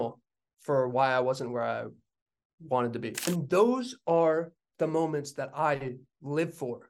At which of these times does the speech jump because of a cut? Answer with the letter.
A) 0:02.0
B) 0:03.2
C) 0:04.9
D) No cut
B